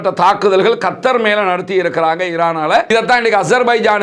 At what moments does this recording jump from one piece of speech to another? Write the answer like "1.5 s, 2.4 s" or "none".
2.9 s